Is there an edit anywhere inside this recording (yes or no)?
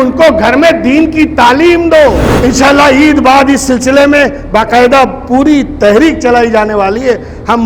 yes